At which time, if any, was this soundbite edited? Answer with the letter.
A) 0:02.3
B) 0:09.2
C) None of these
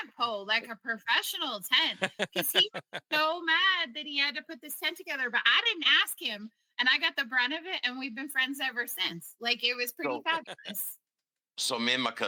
C